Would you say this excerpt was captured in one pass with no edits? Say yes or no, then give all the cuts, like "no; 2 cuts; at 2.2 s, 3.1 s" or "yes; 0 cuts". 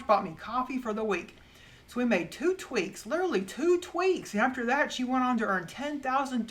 yes; 0 cuts